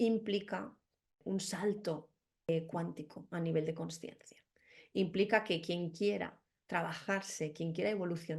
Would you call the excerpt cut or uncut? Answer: cut